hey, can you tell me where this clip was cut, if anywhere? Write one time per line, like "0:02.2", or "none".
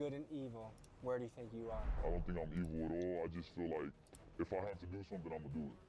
none

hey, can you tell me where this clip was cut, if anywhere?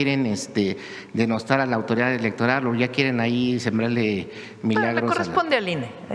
none

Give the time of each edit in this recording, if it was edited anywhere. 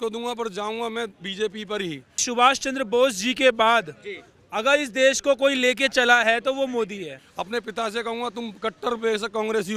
0:02.2
0:07.2

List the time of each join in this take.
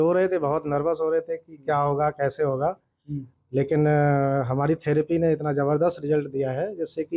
none

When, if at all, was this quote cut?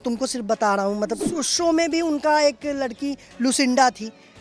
0:01.3

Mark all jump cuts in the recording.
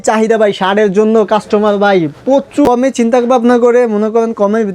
0:02.5

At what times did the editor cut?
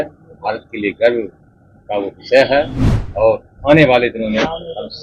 none

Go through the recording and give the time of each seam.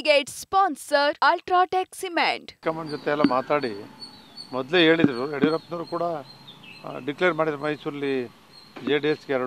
0:02.6

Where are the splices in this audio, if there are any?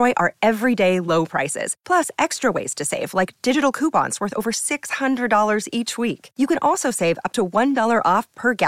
none

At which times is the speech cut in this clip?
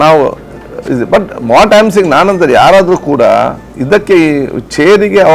0:03.7

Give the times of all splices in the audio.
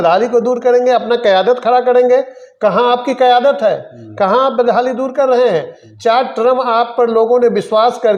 none

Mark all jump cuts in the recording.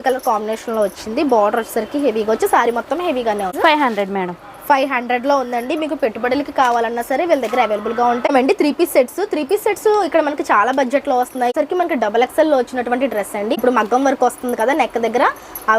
0:03.5
0:08.3
0:11.5
0:13.6

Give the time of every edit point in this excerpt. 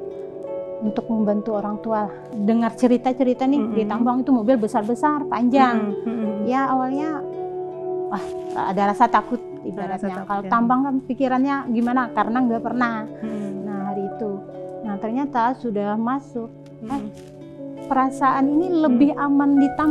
0:02.2

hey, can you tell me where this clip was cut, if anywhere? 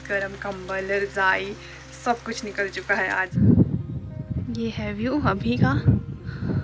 0:03.3

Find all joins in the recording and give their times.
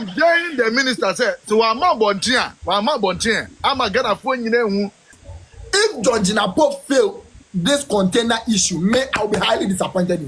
0:05.1

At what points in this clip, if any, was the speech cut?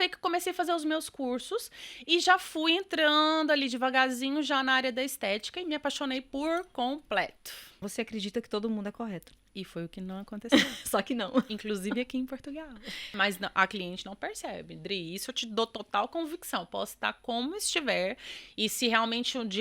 0:07.9
0:13.1

